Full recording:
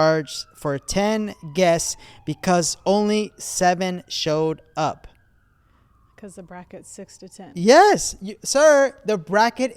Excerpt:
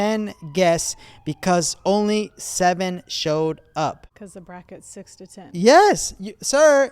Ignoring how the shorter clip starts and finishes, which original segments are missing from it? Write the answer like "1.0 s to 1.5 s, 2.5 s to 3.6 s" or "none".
5.1 s to 6.1 s